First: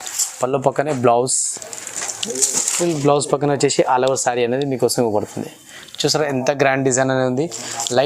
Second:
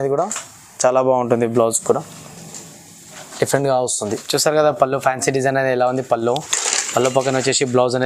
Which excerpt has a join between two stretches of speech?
second; 1 cut; at 4.2 s

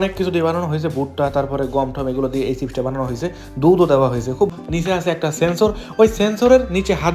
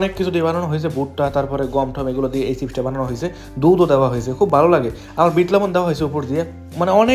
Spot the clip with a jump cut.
first; 1 cut; at 4.5 s

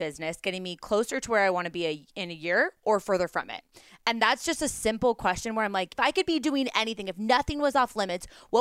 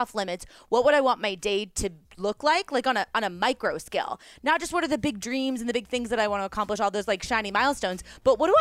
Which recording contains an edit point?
first; 1 cut; at 5.9 s

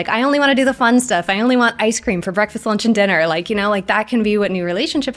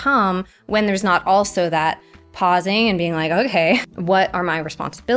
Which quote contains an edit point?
second; 1 cut; at 3.8 s

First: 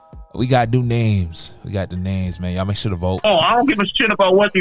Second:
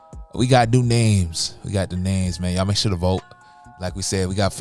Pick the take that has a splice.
first; 1 cut; at 3.2 s

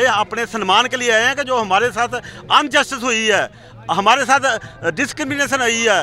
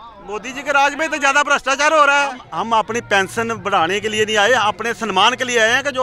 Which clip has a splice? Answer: second; 1 cut; at 2.5 s

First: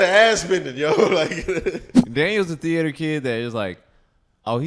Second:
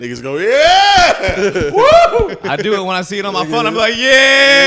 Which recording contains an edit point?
first; 1 cut; at 1.9 s

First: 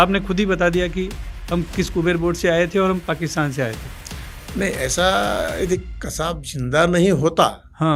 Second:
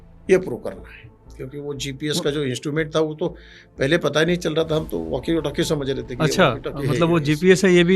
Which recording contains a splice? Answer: second; 1 cut; at 1.3 s

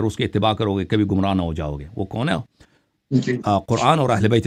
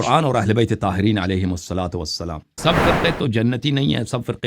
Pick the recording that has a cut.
second; 1 cut; at 2.6 s

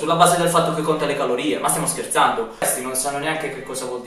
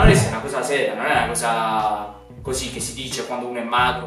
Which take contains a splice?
first; 1 cut; at 2.6 s

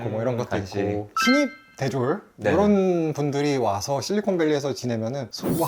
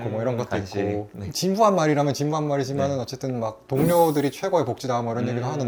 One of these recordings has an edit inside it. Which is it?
first; 1 cut; at 1.1 s

